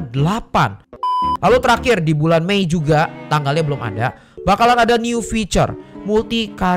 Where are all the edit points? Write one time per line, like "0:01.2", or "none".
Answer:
0:01.0